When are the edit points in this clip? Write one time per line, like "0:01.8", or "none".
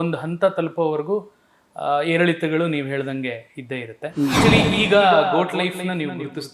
0:04.4